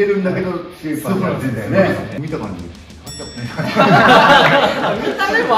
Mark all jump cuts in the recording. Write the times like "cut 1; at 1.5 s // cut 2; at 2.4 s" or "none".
cut 1; at 2.2 s